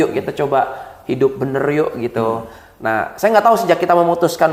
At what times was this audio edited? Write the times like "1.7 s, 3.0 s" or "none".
none